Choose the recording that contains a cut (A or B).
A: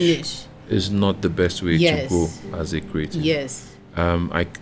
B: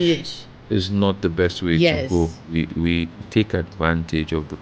B